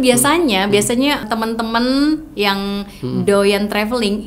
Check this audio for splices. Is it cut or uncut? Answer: cut